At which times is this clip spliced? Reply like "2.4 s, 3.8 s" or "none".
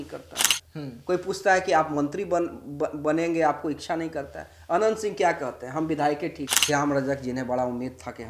6.5 s